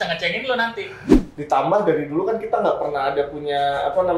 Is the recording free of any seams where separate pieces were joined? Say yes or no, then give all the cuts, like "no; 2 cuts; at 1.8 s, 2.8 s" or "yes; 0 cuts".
no; 1 cut; at 1.1 s